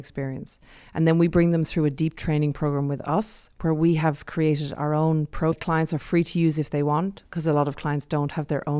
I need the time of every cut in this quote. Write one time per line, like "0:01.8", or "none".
0:05.6